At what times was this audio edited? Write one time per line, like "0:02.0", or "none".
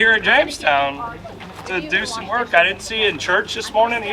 none